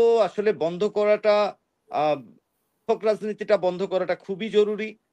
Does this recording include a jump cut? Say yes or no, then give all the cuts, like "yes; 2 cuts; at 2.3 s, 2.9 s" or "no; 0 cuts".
no; 0 cuts